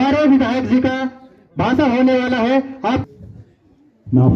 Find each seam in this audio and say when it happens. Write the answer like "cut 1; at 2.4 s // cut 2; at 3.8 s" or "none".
cut 1; at 3.1 s